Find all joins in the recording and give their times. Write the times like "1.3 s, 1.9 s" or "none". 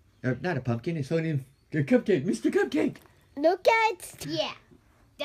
none